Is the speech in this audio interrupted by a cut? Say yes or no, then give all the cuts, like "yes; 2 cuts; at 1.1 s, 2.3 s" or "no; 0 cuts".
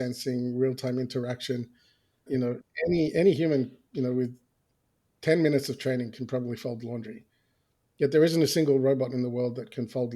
yes; 1 cut; at 2.3 s